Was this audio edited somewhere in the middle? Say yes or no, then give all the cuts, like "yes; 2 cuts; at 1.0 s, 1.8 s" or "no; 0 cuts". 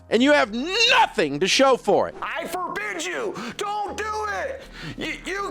yes; 1 cut; at 2.2 s